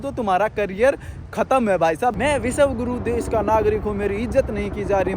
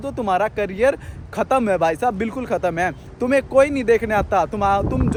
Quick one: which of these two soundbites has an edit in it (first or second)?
first